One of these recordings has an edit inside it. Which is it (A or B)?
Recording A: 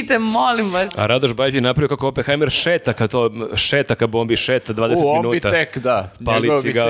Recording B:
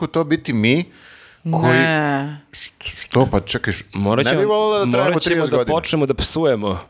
A